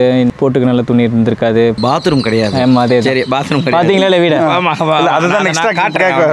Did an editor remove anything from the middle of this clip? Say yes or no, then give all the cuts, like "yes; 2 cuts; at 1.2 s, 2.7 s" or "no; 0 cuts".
no; 0 cuts